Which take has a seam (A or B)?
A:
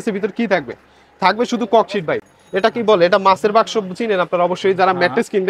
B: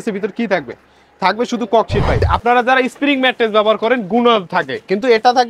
B